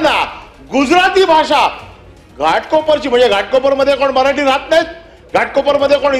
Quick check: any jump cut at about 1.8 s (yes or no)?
no